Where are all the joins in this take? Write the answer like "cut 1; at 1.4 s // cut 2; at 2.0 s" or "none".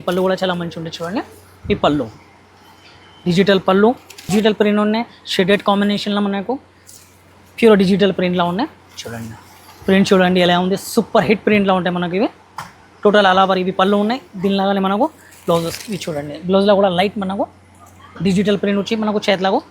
cut 1; at 4.3 s

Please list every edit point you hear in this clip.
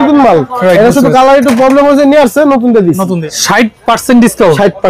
cut 1; at 3.3 s

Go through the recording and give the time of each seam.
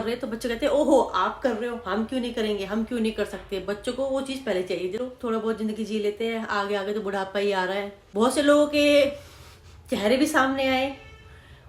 cut 1; at 5.0 s // cut 2; at 8.0 s

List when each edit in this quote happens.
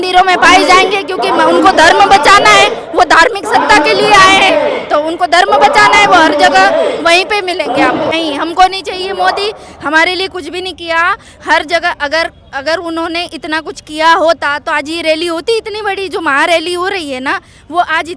cut 1; at 8.1 s

